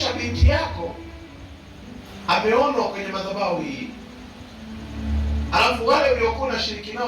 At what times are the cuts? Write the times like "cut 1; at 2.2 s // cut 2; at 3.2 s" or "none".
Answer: cut 1; at 2.0 s